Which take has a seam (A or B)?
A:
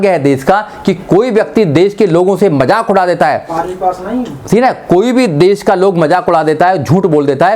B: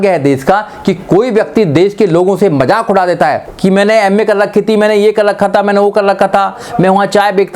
B